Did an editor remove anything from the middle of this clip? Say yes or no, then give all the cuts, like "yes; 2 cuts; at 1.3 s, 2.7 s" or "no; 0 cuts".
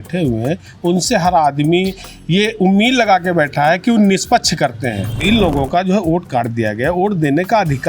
yes; 1 cut; at 5.2 s